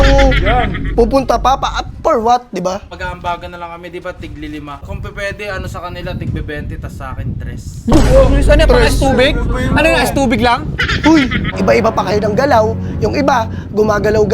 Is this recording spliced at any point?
yes; 3 cuts; at 2.8 s, 4.8 s, 11.4 s

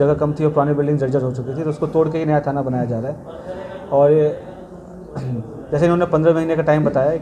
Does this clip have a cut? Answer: no; 0 cuts

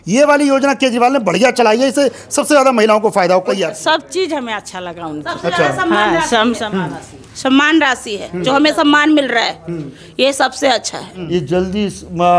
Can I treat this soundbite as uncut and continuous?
no; 2 cuts; at 3.5 s, 11.1 s

